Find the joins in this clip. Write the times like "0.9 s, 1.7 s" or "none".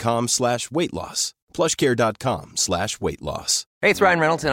3.6 s